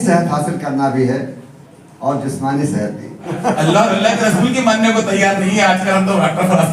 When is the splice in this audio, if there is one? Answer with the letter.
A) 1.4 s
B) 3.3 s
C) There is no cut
B